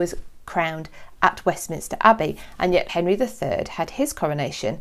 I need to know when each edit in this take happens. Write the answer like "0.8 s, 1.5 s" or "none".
2.9 s